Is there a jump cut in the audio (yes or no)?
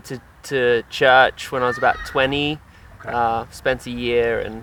no